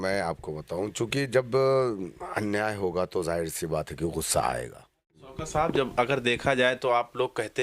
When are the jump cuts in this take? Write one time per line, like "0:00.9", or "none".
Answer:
0:05.3